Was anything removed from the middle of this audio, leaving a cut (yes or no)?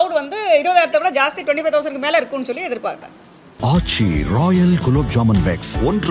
yes